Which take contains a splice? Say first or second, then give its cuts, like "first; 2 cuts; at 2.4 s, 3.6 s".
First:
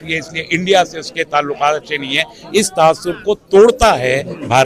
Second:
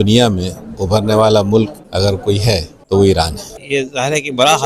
second; 2 cuts; at 2.3 s, 3.6 s